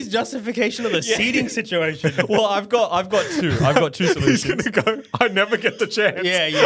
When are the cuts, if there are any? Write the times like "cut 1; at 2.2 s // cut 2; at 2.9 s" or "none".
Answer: none